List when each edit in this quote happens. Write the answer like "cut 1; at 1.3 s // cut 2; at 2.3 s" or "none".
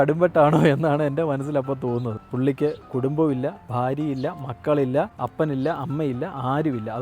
cut 1; at 2.2 s // cut 2; at 5.2 s